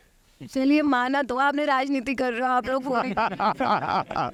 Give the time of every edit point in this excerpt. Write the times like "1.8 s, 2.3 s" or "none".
none